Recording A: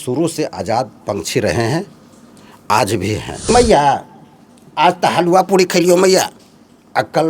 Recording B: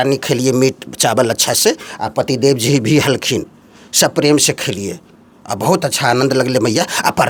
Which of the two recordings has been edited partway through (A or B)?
A